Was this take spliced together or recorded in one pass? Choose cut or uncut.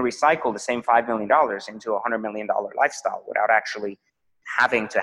uncut